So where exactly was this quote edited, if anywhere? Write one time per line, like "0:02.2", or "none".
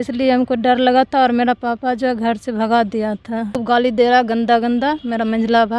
0:03.6